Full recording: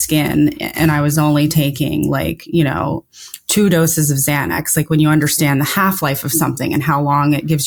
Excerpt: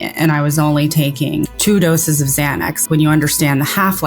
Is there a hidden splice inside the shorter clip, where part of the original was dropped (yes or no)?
yes